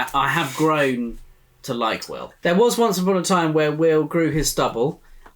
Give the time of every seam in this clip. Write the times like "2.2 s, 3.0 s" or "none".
2.2 s